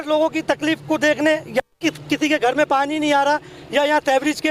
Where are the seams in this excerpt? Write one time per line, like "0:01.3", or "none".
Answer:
none